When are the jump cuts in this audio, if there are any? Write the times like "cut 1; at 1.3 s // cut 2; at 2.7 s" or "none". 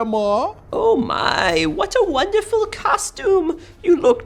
none